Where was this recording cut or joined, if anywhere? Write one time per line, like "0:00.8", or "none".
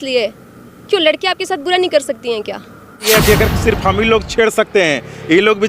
0:03.1